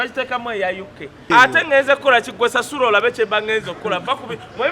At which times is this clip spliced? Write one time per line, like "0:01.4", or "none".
0:01.3